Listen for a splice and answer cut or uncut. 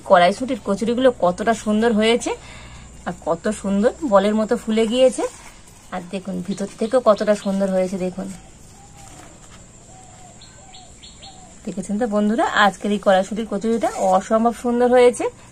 uncut